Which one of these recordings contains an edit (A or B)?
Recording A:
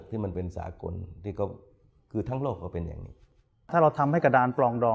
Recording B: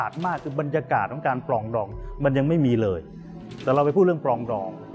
A